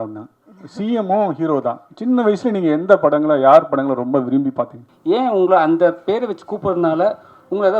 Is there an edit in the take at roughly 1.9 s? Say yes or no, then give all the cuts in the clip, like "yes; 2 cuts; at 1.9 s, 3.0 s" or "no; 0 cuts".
no; 1 cut; at 4.8 s